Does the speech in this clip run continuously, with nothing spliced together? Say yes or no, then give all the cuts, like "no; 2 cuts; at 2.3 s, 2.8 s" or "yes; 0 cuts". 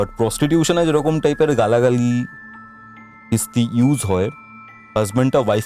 yes; 0 cuts